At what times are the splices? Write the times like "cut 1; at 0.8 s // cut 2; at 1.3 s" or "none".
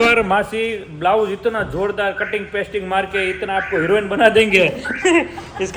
none